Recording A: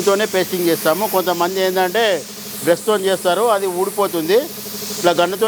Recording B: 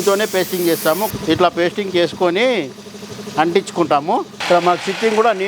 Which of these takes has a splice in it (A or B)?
B